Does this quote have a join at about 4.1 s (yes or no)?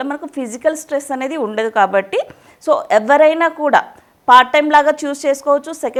no